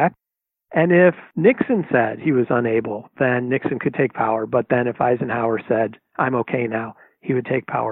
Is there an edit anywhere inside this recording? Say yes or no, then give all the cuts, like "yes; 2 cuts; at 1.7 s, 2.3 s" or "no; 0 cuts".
yes; 1 cut; at 1.3 s